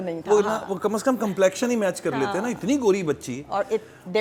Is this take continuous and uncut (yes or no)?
yes